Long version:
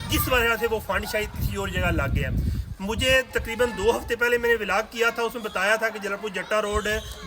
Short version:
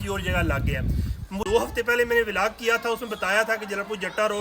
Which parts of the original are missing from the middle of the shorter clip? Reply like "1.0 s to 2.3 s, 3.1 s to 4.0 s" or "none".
2.9 s to 3.8 s